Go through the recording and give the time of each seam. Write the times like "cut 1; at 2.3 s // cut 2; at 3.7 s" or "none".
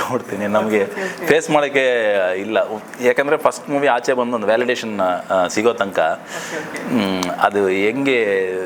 none